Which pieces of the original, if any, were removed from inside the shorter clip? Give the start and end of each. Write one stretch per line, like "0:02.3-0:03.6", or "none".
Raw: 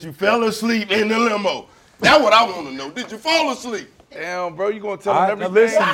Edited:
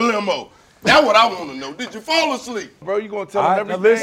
0:04.0-0:04.5

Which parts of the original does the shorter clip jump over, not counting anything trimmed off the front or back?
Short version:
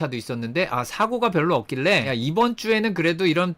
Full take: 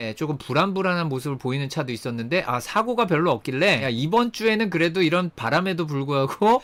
none

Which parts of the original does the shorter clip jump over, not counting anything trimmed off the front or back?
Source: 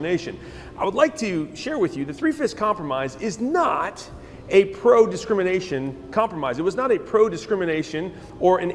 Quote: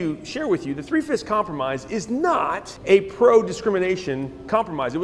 0:04.0-0:04.3

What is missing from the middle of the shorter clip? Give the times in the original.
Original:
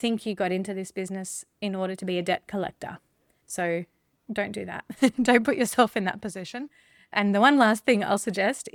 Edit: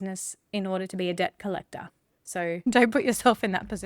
0:03.7-0:05.1

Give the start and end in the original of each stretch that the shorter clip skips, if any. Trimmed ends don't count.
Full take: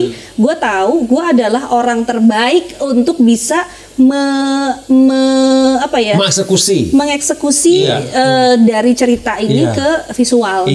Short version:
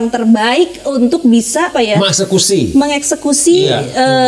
0:03.7-0:05.9

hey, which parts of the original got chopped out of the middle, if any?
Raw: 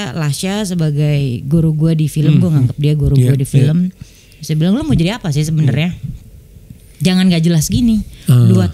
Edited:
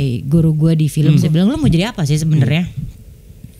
0:02.4-0:04.5

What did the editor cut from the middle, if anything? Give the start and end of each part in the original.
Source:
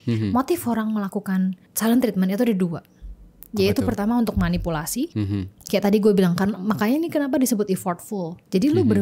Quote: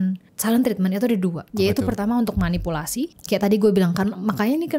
0:02.8-0:03.4
0:05.1-0:05.5

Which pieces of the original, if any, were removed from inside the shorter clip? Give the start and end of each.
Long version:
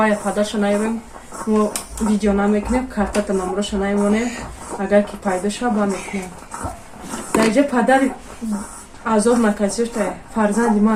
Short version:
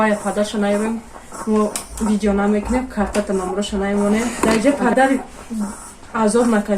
0:04.3-0:07.2

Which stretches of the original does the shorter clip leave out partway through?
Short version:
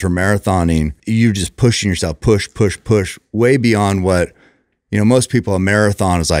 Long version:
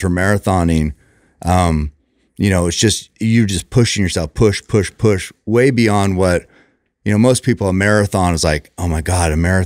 0:01.0-0:03.1

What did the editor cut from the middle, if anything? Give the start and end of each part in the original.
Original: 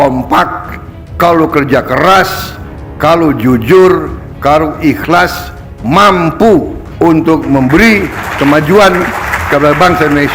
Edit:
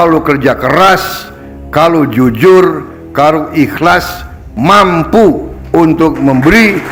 none

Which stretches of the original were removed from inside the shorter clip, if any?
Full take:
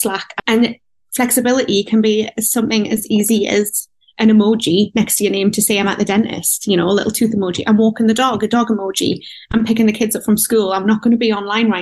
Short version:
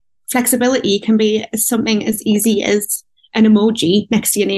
none

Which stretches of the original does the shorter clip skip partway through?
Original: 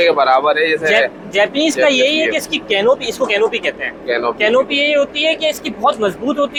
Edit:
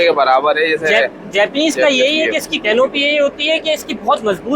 0:02.6-0:04.4

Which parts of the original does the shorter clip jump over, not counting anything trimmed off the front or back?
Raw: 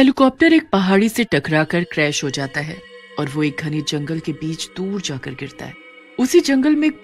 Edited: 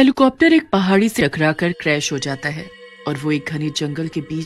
0:01.2-0:01.3

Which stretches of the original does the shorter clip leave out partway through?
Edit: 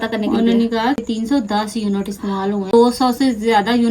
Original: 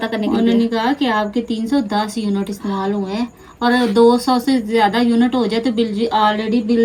0:01.0-0:01.4
0:03.1-0:04.0

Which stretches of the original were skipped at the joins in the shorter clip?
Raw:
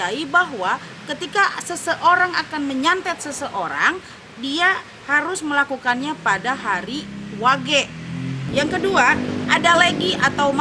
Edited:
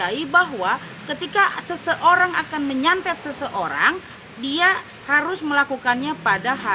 none

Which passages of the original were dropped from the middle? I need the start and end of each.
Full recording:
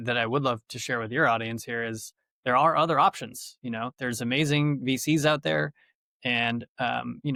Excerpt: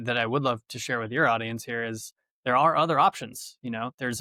none

